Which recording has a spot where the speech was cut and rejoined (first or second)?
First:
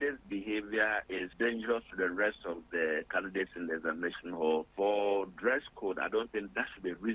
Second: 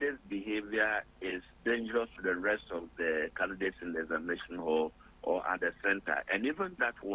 first